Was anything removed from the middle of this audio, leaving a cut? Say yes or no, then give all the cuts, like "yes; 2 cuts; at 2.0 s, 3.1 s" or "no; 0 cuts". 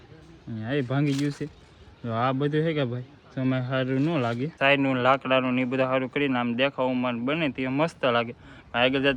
yes; 1 cut; at 4.5 s